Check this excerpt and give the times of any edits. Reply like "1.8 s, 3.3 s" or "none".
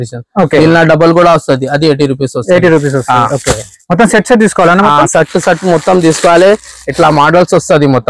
none